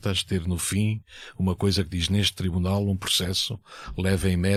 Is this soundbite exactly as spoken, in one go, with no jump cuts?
yes; 0 cuts

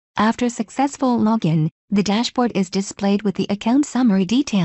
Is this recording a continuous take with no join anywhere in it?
no; 1 cut; at 0.9 s

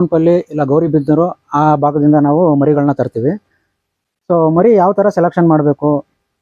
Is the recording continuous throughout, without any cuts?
yes; 0 cuts

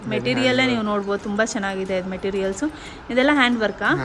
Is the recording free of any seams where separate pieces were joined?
yes; 0 cuts

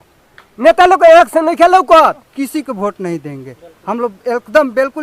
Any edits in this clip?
yes; 1 cut; at 2.3 s

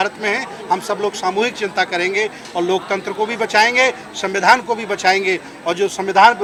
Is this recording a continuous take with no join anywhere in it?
yes; 0 cuts

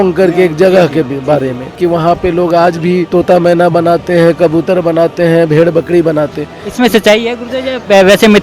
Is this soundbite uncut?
no; 2 cuts; at 1.8 s, 3.1 s

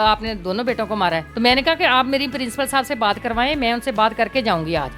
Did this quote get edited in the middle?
no; 0 cuts

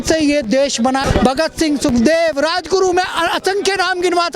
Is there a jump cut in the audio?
yes; 1 cut; at 1.0 s

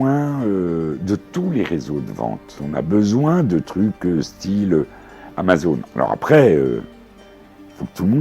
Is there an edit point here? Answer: yes; 1 cut; at 2.6 s

